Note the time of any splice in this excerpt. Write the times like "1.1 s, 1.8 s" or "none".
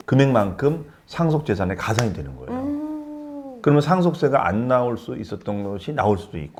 none